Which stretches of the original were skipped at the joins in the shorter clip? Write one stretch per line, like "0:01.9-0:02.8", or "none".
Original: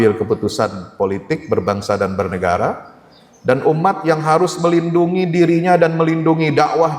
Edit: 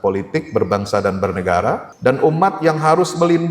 0:02.8-0:03.3